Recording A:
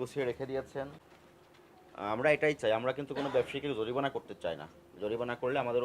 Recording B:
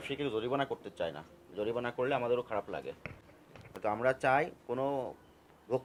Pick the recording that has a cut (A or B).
A